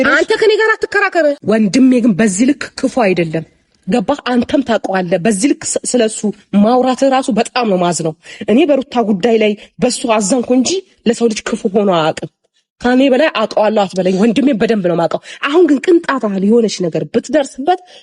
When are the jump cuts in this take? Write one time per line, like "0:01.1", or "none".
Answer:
0:01.4